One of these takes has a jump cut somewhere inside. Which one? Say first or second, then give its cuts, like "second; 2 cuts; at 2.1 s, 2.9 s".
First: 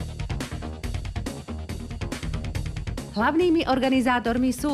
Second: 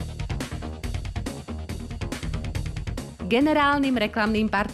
second; 1 cut; at 3.1 s